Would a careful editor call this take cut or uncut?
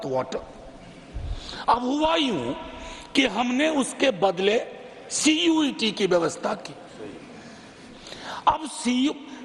uncut